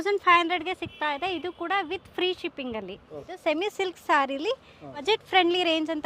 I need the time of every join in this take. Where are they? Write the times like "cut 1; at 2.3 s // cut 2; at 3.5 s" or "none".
cut 1; at 3.3 s // cut 2; at 5.0 s